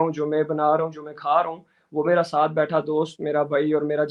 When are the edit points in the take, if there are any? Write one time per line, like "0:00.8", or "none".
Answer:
none